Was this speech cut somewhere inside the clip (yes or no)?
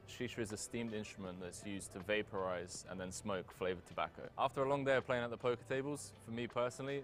no